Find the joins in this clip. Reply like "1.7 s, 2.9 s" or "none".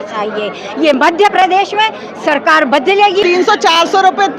3.2 s